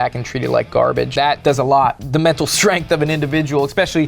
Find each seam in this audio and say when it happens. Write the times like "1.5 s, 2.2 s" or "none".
1.1 s, 2.0 s